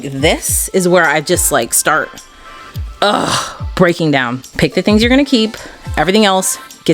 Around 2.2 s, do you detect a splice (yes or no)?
no